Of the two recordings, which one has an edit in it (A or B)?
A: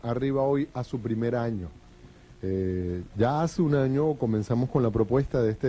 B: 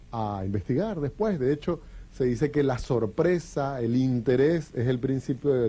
A